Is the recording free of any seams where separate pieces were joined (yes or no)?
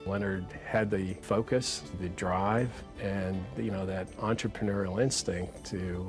no